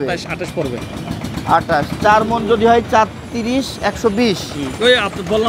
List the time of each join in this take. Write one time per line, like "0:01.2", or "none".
none